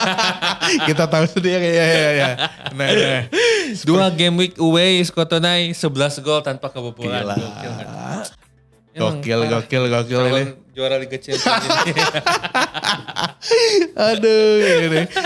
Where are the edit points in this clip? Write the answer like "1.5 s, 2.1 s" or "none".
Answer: none